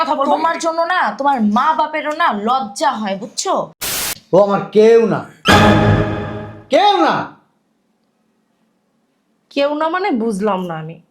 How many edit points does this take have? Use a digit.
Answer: 1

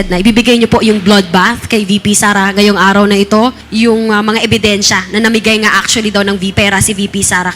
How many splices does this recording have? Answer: 2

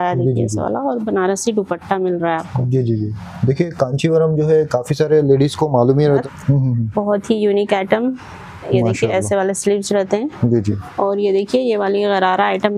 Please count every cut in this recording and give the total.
1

